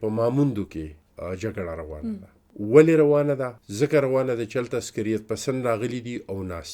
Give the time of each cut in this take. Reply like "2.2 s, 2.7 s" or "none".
1.0 s, 2.4 s, 3.6 s